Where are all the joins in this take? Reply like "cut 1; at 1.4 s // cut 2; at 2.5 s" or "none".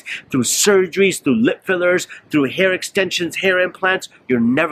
none